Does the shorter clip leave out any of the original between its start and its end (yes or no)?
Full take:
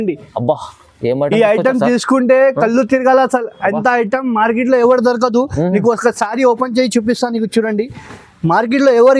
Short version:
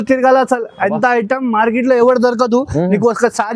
no